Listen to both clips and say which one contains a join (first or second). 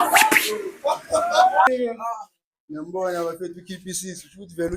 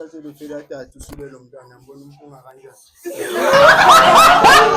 first